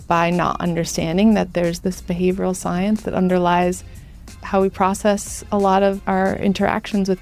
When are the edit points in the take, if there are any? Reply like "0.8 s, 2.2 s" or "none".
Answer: 1.8 s, 4.2 s, 6.0 s